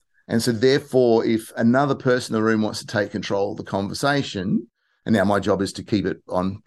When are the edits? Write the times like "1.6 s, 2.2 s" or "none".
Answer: none